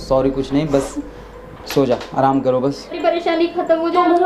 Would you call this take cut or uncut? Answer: cut